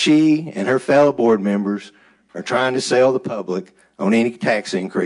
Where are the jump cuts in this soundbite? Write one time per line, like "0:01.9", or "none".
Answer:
none